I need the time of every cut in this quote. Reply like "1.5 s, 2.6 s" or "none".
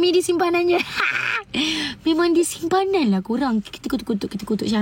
none